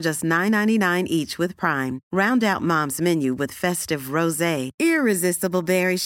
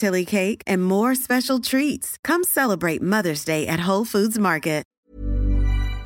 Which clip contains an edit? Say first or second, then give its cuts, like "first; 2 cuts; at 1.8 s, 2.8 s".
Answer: second; 1 cut; at 4.9 s